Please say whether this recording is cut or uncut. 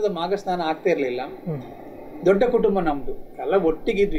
uncut